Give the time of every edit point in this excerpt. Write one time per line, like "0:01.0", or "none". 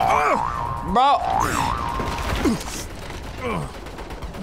none